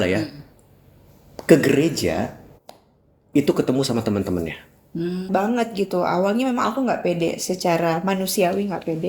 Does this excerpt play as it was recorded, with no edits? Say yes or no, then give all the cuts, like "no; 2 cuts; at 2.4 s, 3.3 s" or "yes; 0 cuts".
no; 1 cut; at 5.3 s